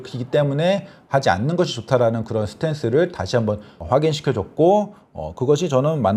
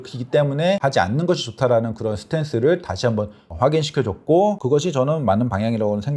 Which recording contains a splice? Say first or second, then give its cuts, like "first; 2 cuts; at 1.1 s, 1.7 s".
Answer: second; 2 cuts; at 0.8 s, 4.6 s